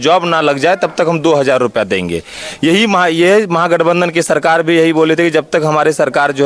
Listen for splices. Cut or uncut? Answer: uncut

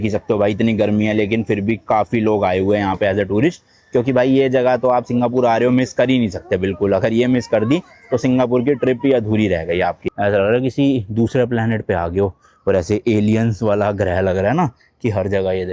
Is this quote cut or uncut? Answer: cut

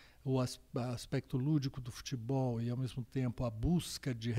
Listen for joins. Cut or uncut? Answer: uncut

